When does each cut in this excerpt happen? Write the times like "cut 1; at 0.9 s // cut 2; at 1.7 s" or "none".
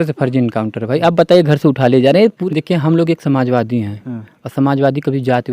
cut 1; at 2.4 s